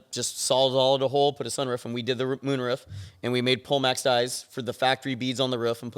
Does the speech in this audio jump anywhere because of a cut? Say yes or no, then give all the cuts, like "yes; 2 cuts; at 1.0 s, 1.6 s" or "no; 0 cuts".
no; 0 cuts